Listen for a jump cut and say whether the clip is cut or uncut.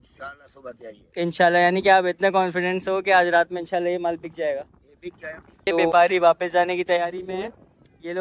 cut